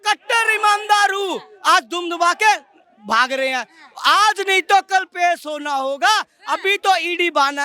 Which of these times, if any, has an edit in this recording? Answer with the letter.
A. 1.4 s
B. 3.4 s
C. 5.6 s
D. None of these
D